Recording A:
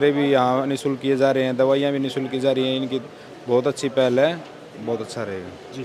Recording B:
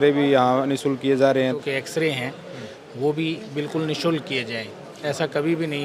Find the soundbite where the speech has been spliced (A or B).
B